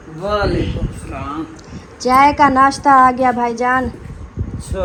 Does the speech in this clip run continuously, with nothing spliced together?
yes; 0 cuts

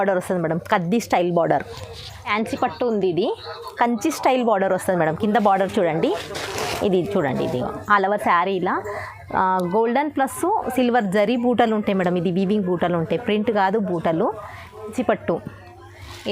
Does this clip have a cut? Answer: yes; 2 cuts; at 2.3 s, 14.9 s

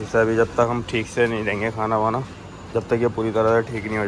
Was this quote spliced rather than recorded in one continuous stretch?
no; 0 cuts

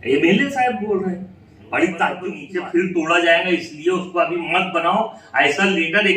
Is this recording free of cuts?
no; 1 cut; at 2.4 s

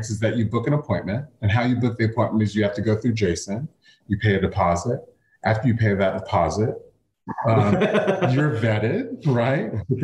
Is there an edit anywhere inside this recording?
yes; 1 cut; at 7.5 s

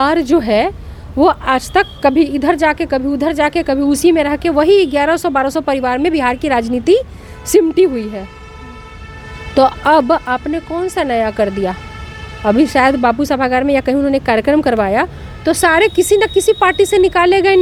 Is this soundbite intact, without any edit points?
yes; 0 cuts

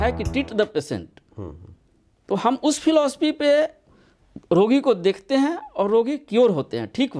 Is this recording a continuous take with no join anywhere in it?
yes; 0 cuts

